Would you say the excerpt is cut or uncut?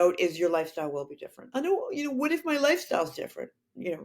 uncut